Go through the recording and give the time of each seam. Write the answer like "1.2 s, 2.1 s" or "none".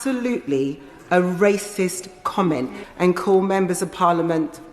2.8 s